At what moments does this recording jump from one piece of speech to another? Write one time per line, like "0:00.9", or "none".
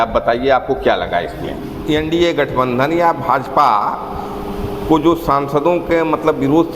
0:01.7